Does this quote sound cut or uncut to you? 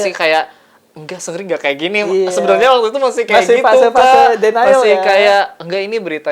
uncut